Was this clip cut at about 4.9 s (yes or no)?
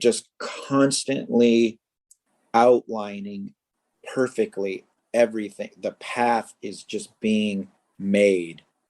yes